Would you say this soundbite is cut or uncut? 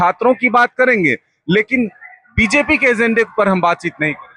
uncut